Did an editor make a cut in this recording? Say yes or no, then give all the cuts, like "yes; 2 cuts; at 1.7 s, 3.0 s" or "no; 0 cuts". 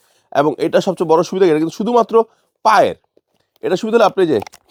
no; 0 cuts